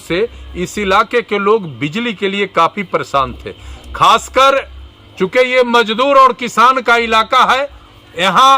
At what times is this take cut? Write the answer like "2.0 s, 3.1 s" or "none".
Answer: none